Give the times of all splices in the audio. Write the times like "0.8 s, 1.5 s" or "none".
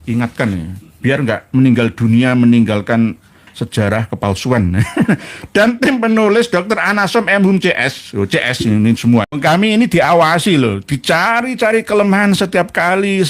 9.3 s